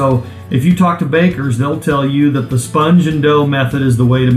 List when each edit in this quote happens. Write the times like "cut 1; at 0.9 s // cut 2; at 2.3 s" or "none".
none